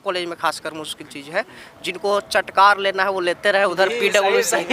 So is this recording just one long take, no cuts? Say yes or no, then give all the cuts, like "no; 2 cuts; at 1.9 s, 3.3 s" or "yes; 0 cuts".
yes; 0 cuts